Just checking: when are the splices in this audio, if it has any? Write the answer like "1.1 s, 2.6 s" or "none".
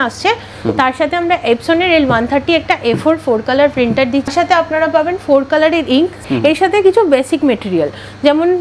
4.3 s, 6.2 s